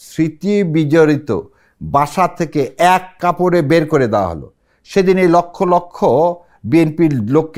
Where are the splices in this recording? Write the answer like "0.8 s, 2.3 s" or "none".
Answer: none